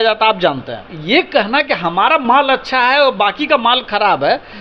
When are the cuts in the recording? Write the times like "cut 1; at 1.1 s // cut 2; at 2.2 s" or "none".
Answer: cut 1; at 0.9 s